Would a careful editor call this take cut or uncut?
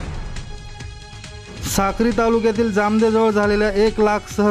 cut